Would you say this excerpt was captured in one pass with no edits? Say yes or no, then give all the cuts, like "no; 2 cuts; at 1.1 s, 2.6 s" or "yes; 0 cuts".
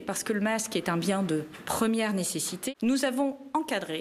no; 1 cut; at 2.5 s